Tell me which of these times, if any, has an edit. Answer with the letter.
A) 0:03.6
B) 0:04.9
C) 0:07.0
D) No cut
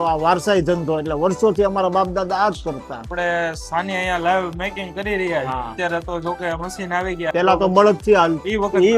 D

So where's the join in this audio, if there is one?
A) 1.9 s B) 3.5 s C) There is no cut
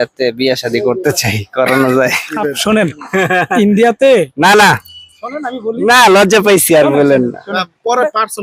C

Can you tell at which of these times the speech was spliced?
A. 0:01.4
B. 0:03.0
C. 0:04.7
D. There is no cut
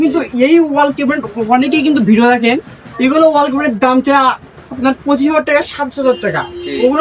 D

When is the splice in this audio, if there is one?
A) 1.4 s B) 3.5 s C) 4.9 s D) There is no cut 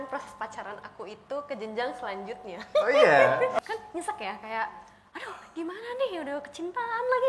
B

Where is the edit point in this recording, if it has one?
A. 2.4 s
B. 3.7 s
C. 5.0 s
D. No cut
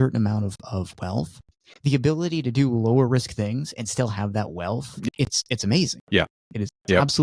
C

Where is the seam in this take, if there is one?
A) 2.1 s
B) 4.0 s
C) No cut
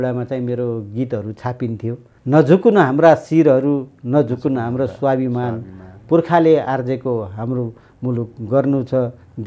A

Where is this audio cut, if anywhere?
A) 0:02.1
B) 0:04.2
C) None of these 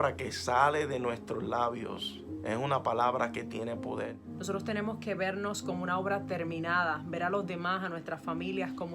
B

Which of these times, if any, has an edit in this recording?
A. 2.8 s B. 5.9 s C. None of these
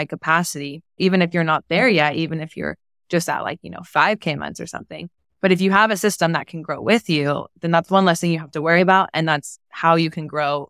C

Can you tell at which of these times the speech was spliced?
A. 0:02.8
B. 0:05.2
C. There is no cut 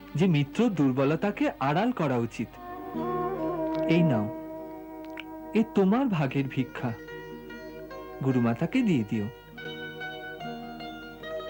A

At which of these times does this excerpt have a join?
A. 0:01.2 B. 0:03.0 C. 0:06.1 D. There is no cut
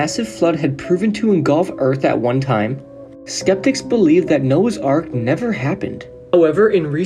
C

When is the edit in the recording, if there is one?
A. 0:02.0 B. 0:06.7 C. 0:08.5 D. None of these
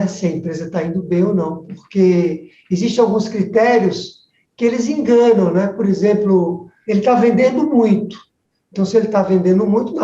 B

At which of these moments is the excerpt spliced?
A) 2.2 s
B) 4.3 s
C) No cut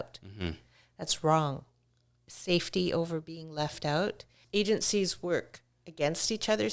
B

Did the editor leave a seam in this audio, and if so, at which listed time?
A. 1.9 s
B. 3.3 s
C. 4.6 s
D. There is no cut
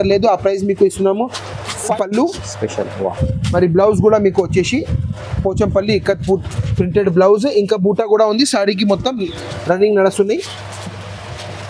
A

